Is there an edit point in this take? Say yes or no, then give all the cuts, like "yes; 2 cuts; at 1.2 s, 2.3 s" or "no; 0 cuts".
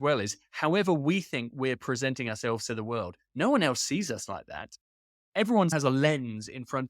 no; 0 cuts